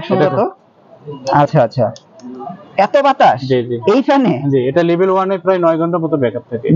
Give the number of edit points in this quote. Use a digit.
0